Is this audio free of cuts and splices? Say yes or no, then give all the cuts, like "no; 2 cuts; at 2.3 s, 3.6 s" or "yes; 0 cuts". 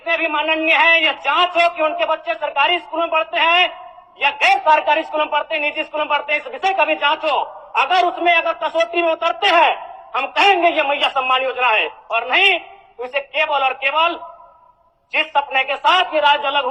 yes; 0 cuts